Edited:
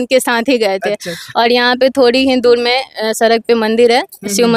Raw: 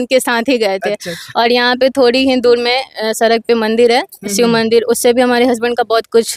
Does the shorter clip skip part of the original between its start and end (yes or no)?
no